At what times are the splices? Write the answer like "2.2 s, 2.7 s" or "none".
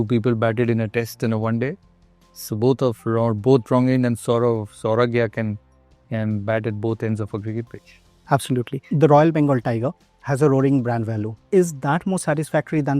8.8 s, 11.3 s